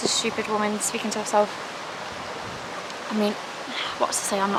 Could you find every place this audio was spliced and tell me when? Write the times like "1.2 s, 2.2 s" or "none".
none